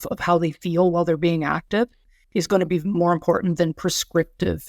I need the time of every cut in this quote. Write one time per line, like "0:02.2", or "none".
none